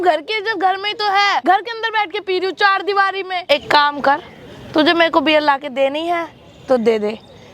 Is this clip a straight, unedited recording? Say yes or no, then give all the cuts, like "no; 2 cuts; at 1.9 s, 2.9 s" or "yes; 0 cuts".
no; 2 cuts; at 1.4 s, 3.4 s